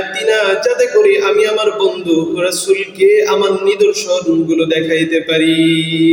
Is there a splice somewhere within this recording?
no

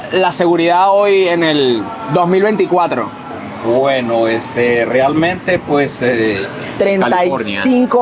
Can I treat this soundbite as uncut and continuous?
no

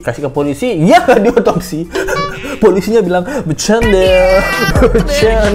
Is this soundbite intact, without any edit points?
yes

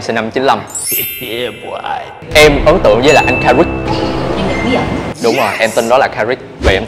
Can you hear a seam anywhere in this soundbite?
yes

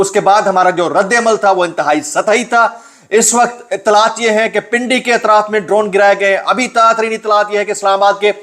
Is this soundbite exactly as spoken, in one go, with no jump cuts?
yes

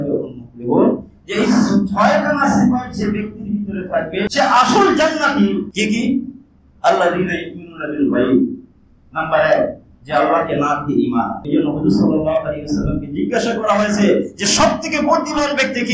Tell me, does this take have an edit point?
yes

